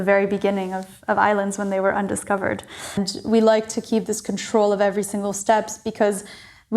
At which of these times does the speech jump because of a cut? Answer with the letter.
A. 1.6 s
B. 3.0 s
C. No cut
B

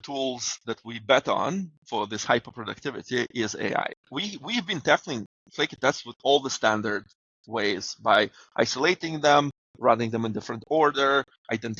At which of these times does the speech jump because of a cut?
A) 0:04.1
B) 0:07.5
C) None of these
A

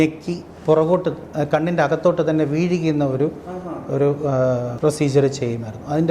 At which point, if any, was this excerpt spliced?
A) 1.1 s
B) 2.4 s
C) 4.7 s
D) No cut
C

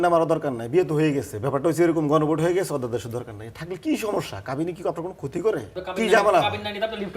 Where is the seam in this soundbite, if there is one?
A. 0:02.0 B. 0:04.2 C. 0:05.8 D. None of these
C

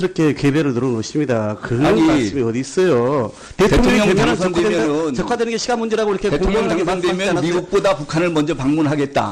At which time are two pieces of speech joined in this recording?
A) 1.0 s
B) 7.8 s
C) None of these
C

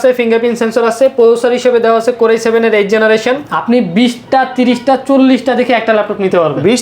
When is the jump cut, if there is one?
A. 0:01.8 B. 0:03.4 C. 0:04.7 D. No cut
B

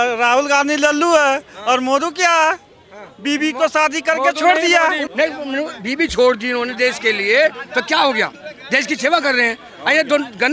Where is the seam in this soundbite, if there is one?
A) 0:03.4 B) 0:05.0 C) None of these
B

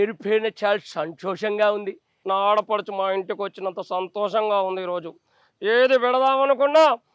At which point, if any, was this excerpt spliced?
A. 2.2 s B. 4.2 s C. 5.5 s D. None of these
A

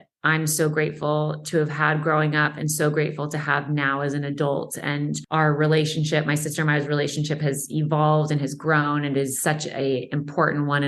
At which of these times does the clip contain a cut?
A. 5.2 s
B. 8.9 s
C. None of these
A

